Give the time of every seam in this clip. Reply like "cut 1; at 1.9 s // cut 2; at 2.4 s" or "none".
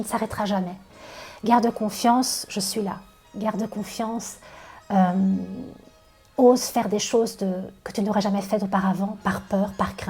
none